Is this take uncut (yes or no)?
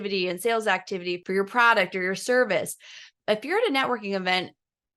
no